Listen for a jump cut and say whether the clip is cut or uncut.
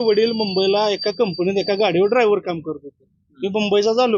uncut